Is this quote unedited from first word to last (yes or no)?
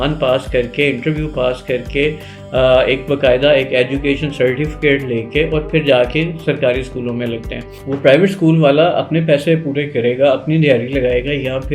no